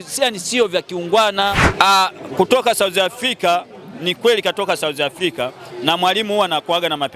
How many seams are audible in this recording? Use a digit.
1